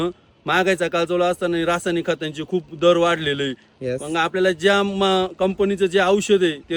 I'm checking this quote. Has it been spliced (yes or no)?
no